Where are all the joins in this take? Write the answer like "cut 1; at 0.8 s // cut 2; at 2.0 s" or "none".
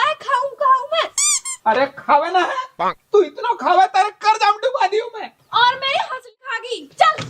cut 1; at 6.4 s